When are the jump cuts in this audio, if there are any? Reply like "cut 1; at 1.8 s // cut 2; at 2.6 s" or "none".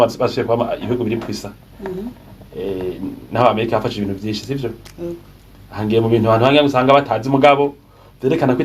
none